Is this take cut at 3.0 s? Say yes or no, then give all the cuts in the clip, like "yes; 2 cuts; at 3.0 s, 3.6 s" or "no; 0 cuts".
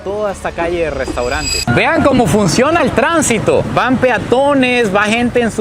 no; 1 cut; at 1.5 s